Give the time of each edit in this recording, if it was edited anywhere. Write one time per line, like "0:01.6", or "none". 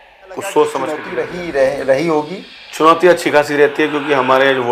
0:01.1

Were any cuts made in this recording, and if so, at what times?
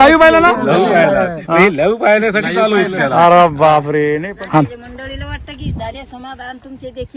0:04.2

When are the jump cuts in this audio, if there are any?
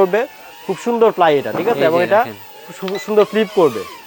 none

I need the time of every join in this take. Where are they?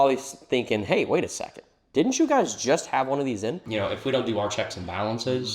0:03.6

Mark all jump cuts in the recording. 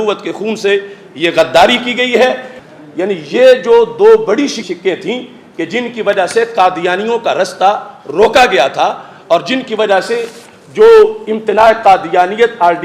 0:02.6
0:04.6

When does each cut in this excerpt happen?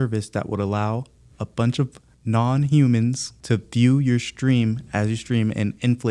0:03.3

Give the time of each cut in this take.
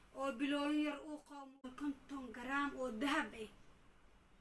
0:01.2

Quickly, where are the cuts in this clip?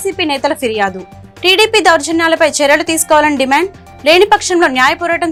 none

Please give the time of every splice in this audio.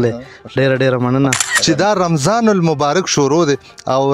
0:01.5

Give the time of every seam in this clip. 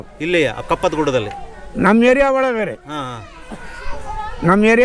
none

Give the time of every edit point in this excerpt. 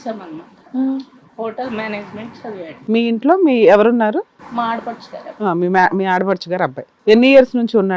0:02.7
0:04.4
0:06.9

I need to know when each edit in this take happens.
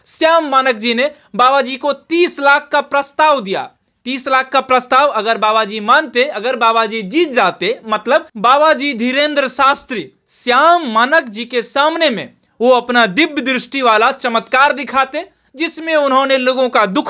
none

